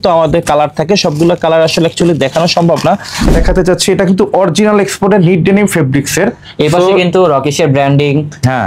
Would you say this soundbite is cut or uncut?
cut